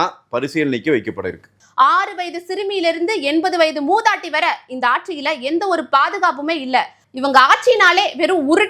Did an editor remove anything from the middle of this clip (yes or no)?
yes